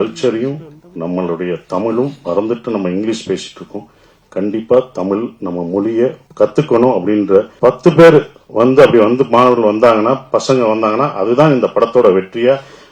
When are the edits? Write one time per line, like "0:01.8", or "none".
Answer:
0:06.2
0:07.5